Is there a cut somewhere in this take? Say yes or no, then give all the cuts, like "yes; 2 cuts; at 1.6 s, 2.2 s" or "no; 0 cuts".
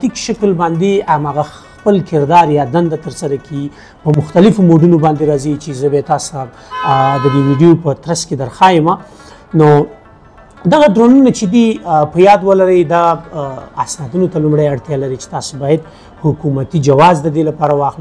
no; 0 cuts